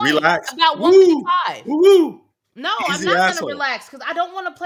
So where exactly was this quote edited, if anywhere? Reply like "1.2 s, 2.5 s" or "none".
none